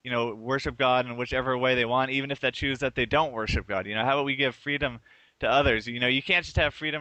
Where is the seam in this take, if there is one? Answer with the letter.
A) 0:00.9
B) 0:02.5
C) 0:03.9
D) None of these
B